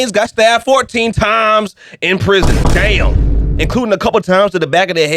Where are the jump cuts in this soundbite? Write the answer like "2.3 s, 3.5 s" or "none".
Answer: none